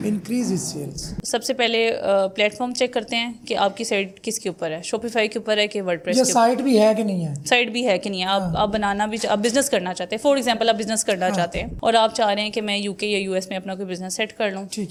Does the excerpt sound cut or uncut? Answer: uncut